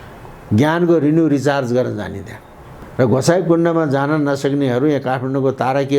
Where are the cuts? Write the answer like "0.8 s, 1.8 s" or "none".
2.8 s